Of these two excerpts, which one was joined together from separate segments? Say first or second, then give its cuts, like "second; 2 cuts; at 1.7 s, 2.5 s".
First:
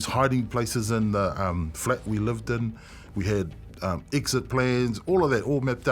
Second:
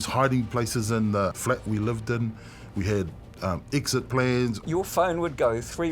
second; 2 cuts; at 1.4 s, 4.6 s